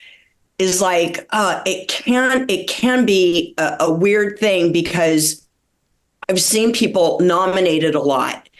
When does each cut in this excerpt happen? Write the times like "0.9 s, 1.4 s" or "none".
none